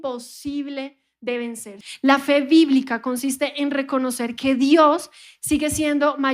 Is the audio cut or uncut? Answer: cut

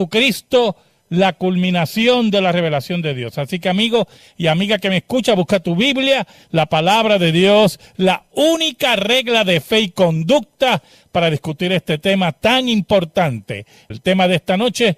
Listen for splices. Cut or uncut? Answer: cut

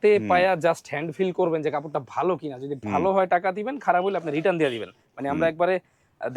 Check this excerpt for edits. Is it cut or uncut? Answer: uncut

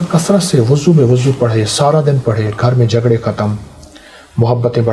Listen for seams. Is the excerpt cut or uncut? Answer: uncut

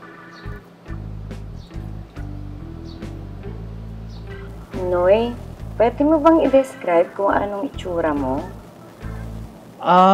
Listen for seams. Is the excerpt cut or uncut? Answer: cut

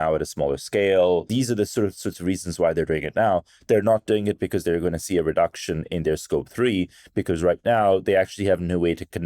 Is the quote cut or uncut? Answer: cut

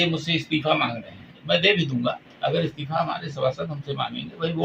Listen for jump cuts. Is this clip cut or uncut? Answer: cut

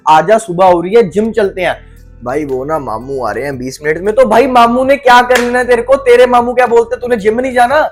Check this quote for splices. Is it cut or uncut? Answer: uncut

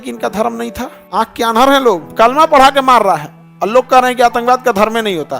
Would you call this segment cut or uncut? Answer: cut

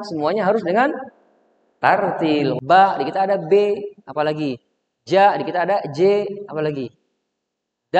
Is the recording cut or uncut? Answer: cut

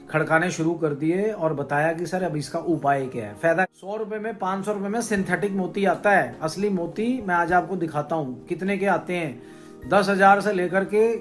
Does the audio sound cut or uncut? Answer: cut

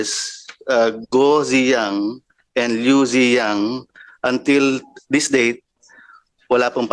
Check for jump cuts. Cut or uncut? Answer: uncut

